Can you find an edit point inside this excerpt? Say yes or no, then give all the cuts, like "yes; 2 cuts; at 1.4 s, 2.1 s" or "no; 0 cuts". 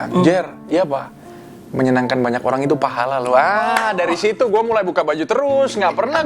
no; 0 cuts